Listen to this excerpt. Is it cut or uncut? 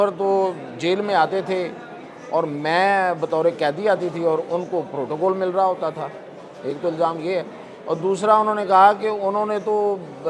uncut